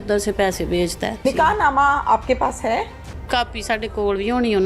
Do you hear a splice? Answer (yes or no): yes